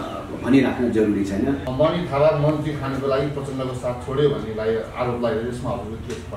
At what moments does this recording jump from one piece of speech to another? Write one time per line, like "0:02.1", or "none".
0:01.7